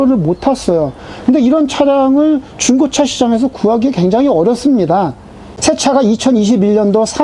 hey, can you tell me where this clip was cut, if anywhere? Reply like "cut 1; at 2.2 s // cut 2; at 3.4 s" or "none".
cut 1; at 5.5 s